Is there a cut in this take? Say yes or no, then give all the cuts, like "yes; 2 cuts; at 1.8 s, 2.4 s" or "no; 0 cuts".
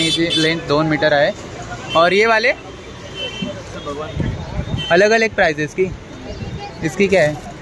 no; 0 cuts